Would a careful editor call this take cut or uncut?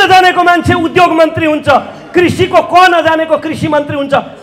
uncut